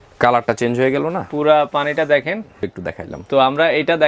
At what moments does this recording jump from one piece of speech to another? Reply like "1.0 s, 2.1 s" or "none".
2.7 s